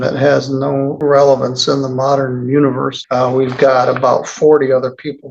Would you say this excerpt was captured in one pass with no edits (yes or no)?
no